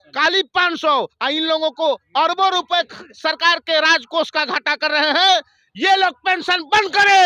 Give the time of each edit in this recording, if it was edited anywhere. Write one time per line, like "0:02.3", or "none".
none

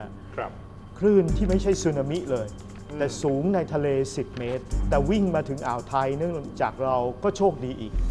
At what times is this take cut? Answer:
0:04.8

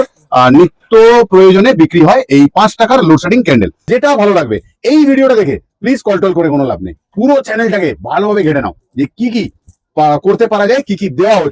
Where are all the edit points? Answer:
0:03.8

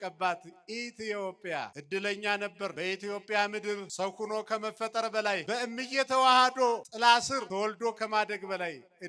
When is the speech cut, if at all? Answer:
0:01.8
0:02.7
0:03.9
0:05.4
0:06.9
0:07.5

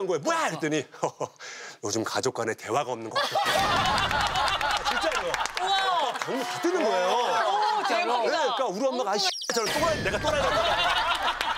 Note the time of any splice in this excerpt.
none

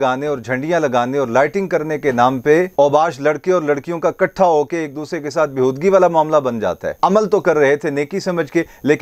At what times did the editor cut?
0:06.9

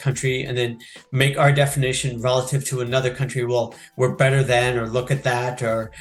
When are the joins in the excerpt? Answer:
none

